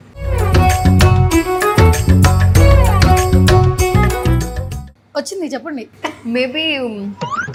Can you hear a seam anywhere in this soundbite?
no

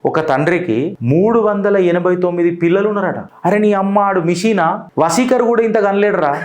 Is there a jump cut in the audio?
yes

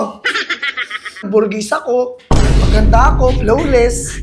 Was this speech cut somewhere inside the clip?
yes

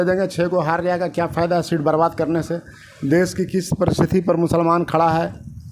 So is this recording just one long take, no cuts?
yes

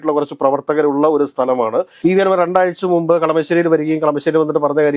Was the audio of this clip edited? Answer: yes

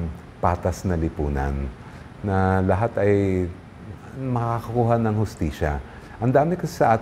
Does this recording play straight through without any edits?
yes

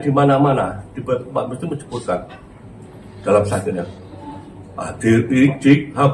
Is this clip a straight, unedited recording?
yes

